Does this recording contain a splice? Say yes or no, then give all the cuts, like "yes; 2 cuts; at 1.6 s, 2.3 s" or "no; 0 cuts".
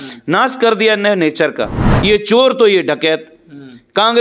yes; 1 cut; at 1.9 s